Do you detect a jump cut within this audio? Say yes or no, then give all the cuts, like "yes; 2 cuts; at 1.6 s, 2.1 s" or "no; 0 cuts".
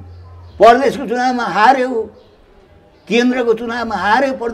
no; 0 cuts